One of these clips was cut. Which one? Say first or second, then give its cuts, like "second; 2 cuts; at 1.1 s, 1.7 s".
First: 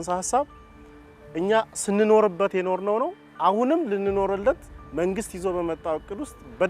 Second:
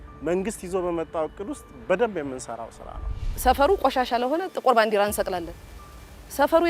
second; 1 cut; at 3.3 s